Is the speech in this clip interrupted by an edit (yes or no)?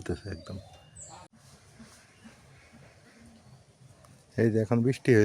yes